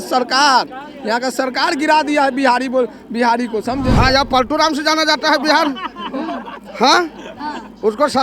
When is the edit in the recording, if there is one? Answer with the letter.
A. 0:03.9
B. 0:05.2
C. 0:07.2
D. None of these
A